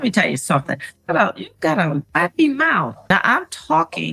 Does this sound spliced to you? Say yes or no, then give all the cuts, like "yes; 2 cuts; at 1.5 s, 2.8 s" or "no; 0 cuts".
yes; 1 cut; at 3.0 s